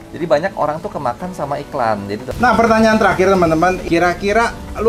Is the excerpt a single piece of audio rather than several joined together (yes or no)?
no